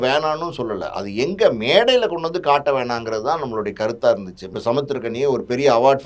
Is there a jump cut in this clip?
yes; 1 cut; at 4.5 s

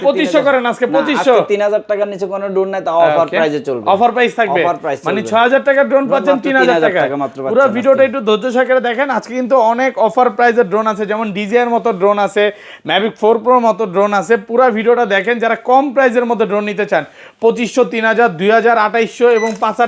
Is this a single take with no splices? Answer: yes; 0 cuts

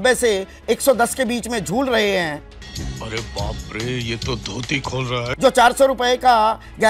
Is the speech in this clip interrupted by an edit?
no; 0 cuts

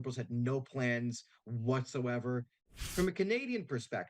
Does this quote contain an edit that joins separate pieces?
yes; 1 cut; at 2.7 s

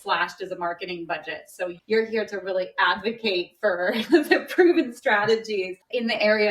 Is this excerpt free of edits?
no; 1 cut; at 1.8 s

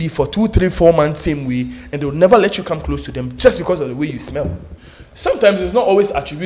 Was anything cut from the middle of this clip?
yes; 1 cut; at 4.7 s

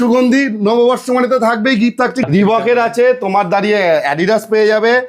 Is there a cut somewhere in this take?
yes; 1 cut; at 2.2 s

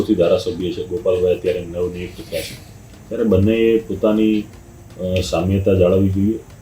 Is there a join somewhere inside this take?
no; 0 cuts

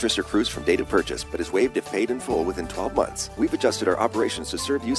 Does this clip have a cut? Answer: yes; 1 cut; at 3.2 s

